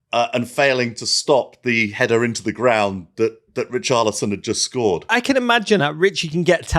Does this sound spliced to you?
yes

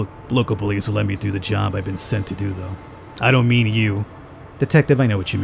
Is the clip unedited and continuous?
no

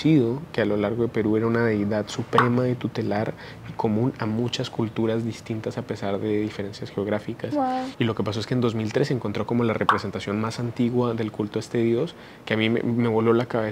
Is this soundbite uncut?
yes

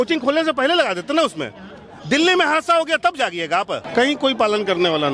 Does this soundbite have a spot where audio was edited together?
yes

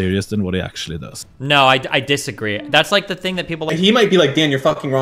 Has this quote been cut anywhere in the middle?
yes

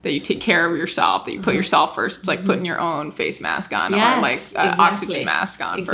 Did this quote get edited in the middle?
no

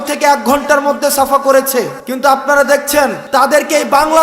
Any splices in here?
yes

